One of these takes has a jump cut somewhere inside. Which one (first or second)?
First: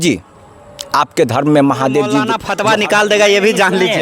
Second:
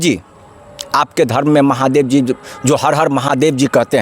first